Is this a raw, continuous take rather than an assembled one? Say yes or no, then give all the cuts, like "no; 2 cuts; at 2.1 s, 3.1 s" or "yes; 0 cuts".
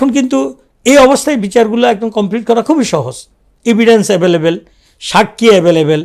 yes; 0 cuts